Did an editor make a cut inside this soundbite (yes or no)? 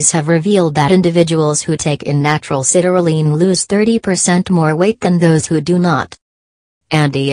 yes